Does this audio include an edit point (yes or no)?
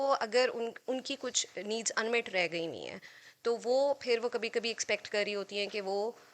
no